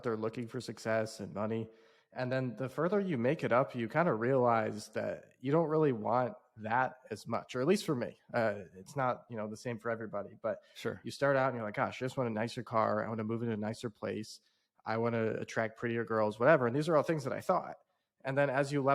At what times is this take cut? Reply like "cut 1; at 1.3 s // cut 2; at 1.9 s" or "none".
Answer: none